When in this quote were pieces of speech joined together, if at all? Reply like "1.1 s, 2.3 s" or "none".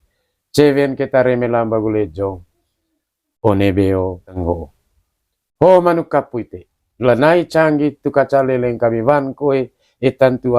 4.4 s